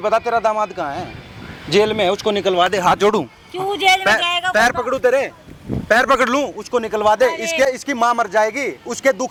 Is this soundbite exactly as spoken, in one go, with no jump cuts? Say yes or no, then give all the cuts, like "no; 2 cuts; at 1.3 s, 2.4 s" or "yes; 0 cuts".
yes; 0 cuts